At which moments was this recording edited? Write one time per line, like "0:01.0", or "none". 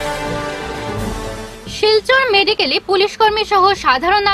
0:00.9